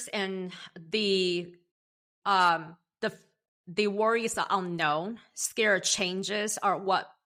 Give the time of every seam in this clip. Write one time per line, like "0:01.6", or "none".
none